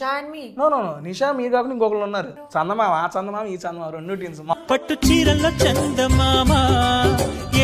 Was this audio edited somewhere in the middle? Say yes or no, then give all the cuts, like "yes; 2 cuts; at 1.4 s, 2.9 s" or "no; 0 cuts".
yes; 2 cuts; at 2.4 s, 4.5 s